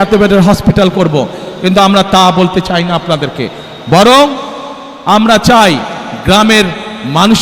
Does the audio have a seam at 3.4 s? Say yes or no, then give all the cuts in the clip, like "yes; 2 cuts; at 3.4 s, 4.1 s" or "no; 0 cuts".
no; 0 cuts